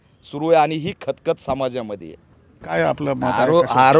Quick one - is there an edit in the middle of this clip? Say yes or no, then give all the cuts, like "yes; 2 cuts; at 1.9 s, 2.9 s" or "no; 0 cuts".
yes; 1 cut; at 2.7 s